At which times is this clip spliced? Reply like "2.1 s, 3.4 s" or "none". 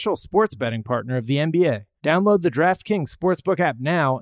1.9 s